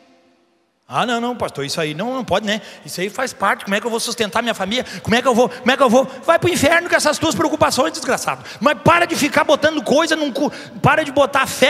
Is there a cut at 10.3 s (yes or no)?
no